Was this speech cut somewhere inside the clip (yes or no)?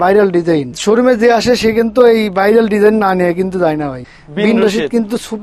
yes